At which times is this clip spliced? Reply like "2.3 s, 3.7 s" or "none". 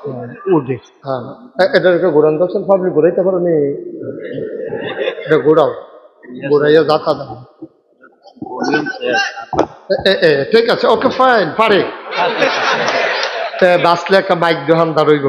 1.1 s